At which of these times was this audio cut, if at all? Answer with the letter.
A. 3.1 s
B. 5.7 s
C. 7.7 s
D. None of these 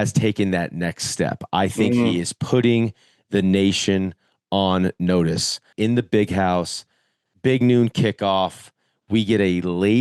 B